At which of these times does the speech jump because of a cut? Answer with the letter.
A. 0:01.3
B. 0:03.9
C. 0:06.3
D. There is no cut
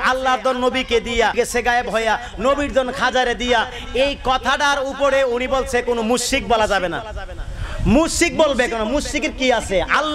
A